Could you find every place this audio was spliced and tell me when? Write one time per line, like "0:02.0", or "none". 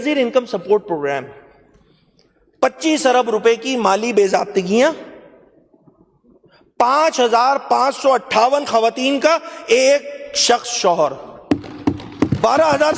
none